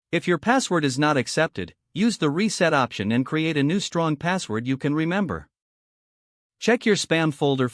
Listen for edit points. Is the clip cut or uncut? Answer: uncut